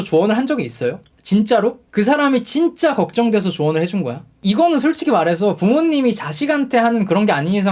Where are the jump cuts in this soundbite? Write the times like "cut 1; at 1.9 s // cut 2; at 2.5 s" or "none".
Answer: none